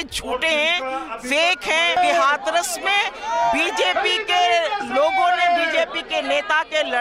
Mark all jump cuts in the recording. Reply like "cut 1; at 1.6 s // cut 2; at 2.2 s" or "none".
cut 1; at 2.0 s